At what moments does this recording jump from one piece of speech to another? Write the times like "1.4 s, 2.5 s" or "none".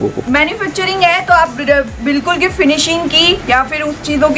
none